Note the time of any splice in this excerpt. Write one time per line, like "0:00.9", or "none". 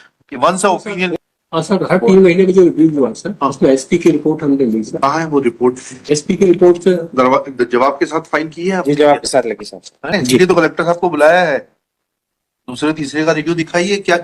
0:01.1
0:10.1